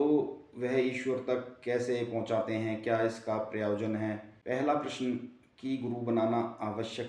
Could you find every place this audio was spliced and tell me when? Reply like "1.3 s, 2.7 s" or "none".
4.3 s